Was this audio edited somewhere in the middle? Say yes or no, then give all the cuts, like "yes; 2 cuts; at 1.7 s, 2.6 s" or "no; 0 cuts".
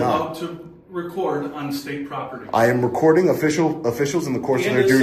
no; 0 cuts